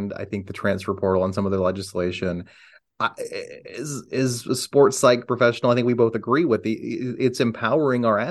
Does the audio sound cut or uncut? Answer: uncut